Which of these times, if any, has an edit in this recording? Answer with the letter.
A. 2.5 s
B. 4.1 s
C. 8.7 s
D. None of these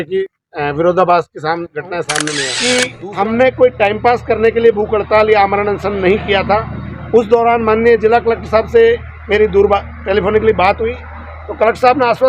A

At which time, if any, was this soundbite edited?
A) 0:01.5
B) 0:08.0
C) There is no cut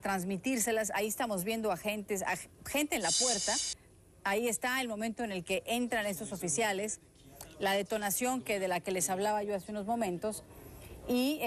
B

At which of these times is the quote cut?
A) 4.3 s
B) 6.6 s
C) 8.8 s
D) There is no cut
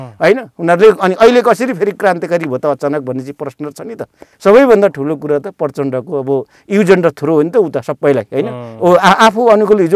A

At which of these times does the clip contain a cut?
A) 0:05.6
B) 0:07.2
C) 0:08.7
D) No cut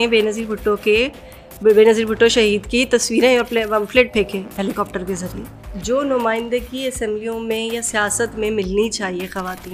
A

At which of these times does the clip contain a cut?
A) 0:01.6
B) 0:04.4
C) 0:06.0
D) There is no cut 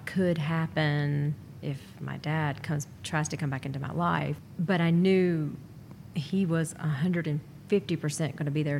B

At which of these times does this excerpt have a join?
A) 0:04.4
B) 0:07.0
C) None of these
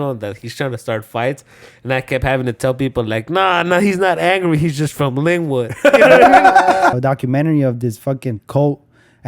B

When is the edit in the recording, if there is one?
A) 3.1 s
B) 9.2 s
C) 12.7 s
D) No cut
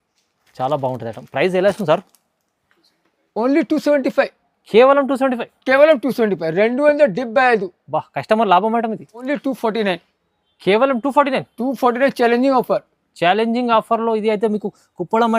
B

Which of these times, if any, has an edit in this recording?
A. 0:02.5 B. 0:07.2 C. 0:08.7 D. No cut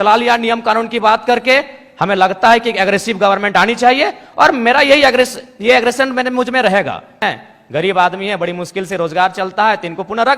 B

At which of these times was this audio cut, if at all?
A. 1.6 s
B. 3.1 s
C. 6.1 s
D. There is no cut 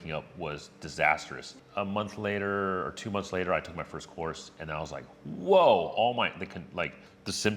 A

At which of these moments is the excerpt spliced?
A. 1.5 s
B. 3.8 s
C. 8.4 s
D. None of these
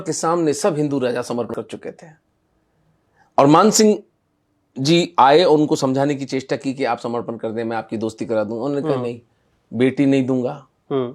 A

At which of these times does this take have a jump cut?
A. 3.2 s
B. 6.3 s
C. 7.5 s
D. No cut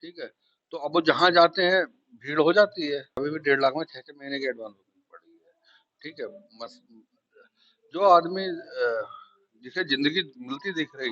A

